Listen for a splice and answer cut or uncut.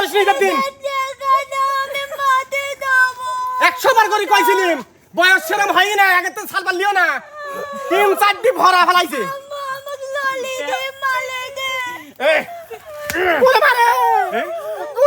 uncut